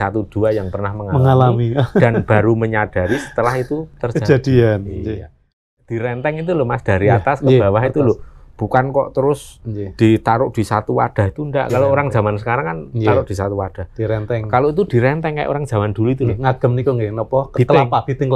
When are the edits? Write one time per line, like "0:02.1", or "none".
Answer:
0:05.7